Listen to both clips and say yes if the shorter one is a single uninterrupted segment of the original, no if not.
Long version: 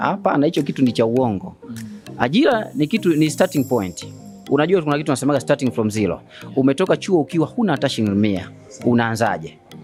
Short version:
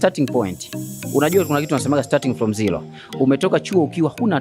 yes